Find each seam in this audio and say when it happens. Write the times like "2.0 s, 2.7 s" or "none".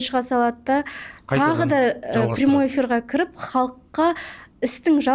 none